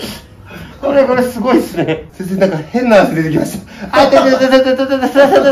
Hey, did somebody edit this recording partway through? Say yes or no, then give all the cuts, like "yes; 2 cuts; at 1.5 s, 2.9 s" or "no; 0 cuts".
yes; 1 cut; at 2.1 s